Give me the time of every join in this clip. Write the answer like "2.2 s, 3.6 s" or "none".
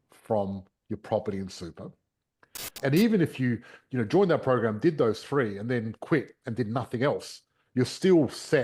2.7 s